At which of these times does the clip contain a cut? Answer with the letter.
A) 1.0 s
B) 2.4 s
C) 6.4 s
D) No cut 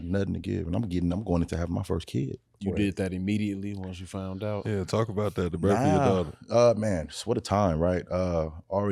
B